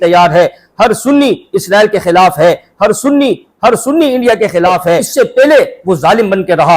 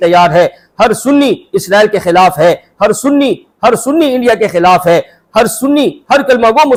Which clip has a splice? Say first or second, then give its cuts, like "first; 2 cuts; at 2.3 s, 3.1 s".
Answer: first; 1 cut; at 5.1 s